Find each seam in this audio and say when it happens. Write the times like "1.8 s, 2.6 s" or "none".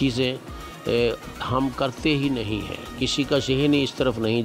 none